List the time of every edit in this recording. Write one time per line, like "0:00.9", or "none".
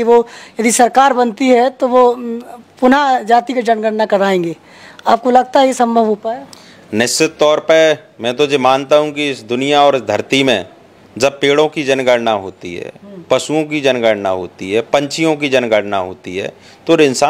none